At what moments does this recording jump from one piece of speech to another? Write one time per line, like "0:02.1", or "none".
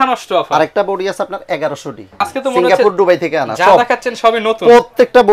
0:02.3